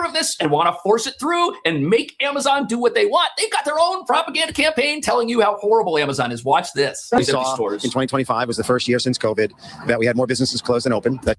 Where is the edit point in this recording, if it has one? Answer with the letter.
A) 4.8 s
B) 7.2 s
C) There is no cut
B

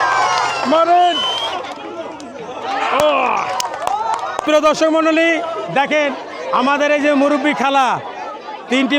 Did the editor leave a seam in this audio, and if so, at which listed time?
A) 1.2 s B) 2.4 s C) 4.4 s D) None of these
C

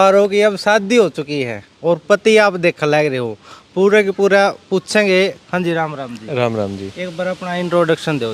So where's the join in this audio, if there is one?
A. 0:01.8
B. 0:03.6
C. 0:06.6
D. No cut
D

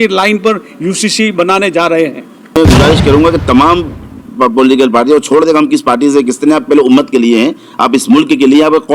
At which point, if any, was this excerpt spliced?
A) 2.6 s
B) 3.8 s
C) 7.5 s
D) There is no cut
A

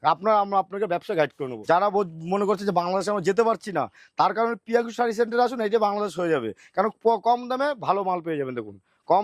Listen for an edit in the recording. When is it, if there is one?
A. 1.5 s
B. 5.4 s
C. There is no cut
A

